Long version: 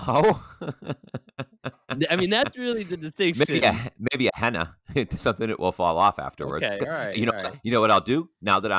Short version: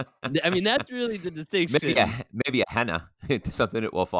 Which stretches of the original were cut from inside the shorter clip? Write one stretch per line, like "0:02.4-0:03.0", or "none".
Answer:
none

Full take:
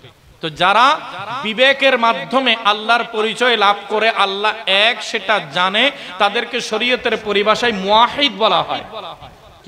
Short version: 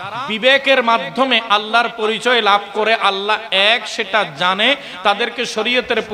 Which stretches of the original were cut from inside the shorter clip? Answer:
none

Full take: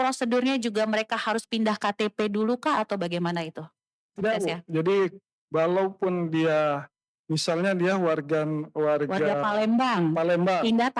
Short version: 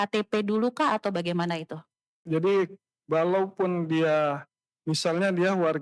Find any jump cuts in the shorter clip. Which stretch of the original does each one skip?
0:04.1-0:04.6

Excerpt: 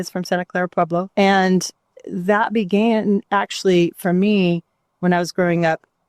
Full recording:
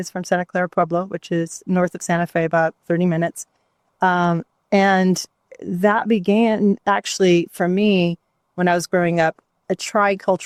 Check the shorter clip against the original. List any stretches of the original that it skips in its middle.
0:01.1-0:04.6

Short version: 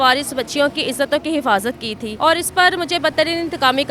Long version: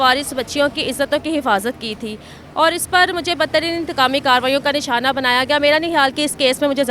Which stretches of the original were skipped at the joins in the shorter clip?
0:02.0-0:02.3

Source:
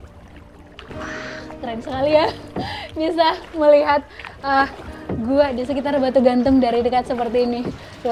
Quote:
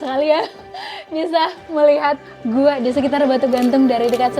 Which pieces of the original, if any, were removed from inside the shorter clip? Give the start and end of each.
0:04.2-0:05.0

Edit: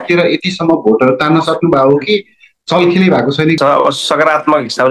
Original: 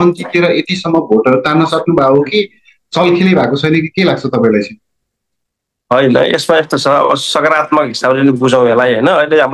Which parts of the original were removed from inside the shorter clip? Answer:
0:03.8-0:06.8

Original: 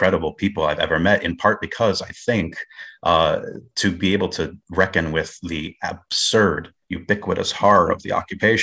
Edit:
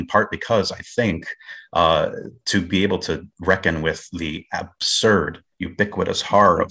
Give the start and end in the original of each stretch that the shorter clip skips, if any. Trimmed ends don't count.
none

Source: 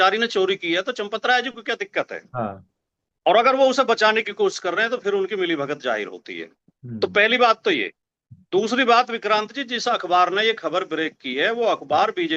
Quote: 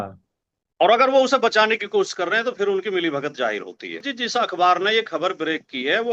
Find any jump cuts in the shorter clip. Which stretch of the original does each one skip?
0:06.6-0:09.6

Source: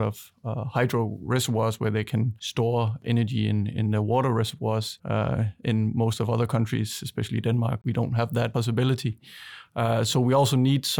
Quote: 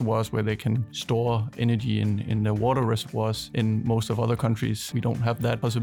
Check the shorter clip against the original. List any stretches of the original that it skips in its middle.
0:04.9-0:05.6
0:07.0-0:07.8

